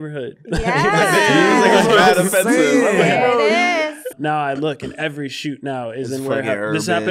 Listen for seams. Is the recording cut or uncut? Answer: cut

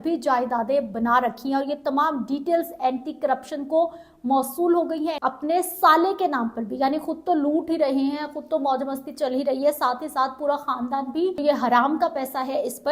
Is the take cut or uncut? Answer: cut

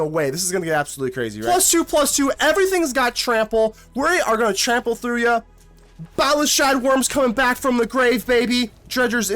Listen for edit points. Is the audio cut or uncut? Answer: cut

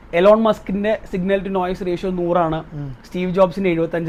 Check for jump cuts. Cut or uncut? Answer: uncut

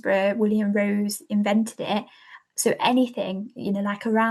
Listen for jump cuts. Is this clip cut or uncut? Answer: uncut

